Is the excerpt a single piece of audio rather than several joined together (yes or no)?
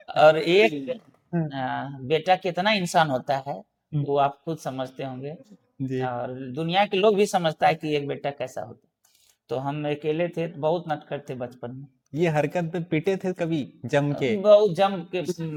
yes